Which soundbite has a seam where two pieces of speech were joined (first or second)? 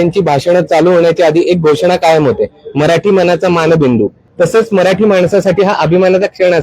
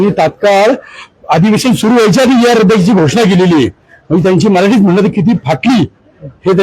first